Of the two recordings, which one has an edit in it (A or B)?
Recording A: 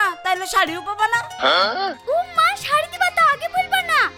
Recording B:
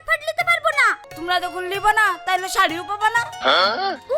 B